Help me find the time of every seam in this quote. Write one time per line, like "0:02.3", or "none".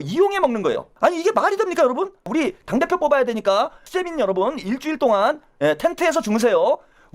0:00.9
0:02.2
0:03.9